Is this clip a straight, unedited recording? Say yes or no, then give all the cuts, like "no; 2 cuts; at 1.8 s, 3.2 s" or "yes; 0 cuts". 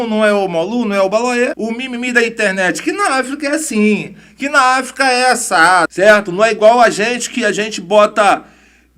no; 2 cuts; at 1.6 s, 5.9 s